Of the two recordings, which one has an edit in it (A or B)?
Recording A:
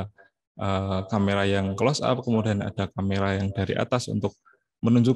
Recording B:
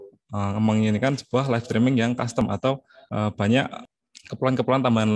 B